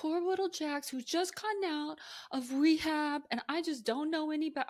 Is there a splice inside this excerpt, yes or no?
no